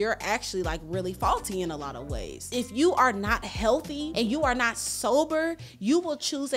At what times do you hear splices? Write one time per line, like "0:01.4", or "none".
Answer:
0:02.4
0:04.0